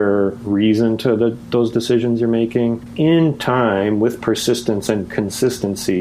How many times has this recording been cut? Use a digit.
1